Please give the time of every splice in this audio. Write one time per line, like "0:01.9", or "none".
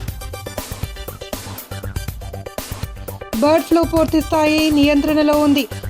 none